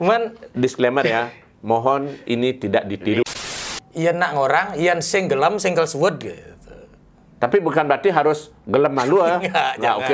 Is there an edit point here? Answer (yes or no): yes